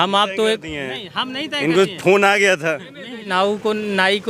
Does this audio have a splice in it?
yes; 1 cut; at 3.2 s

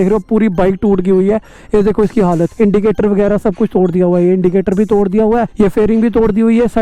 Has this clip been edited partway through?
yes; 2 cuts; at 2.5 s, 5.5 s

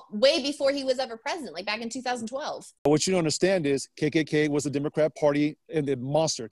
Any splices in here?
yes; 1 cut; at 2.8 s

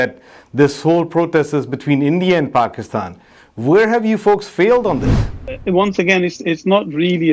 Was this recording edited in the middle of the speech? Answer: yes; 1 cut; at 5.5 s

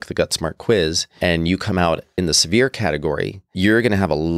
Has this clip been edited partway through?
yes; 3 cuts; at 1.1 s, 2.1 s, 3.4 s

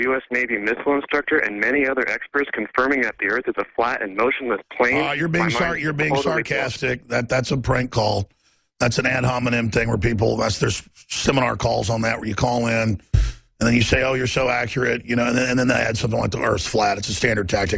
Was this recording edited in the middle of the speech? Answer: no; 0 cuts

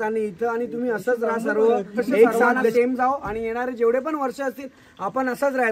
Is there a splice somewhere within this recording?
yes; 1 cut; at 2.7 s

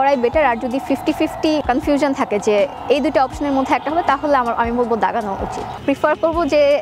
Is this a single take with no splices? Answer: no; 2 cuts; at 1.6 s, 5.8 s

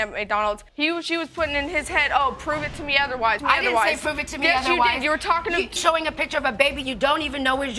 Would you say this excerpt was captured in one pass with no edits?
yes; 0 cuts

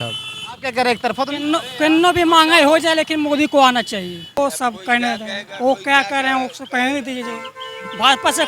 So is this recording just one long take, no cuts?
no; 1 cut; at 4.4 s

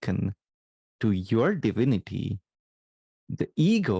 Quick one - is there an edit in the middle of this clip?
no; 0 cuts

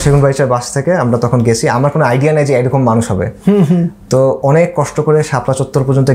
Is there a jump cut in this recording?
no; 0 cuts

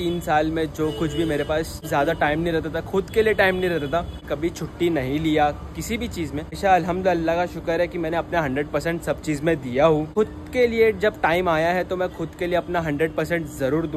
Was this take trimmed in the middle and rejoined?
yes; 4 cuts; at 1.8 s, 4.3 s, 6.6 s, 10.1 s

